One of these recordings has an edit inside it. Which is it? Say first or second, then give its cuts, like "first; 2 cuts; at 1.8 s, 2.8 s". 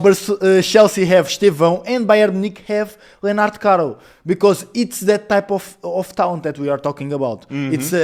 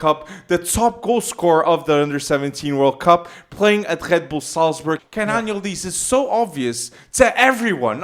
second; 1 cut; at 5.1 s